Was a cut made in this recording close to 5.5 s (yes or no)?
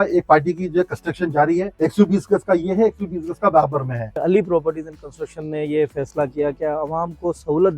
no